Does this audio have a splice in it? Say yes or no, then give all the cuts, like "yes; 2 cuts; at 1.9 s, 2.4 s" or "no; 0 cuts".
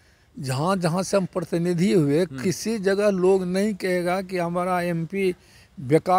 no; 0 cuts